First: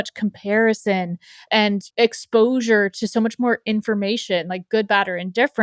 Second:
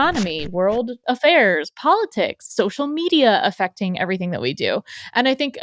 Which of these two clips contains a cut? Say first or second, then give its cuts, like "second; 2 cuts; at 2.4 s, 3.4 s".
second; 1 cut; at 0.9 s